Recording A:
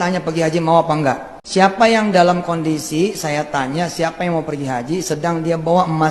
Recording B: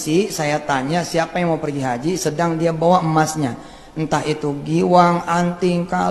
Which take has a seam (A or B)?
A